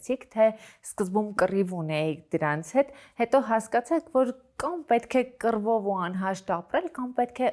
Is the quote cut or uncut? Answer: uncut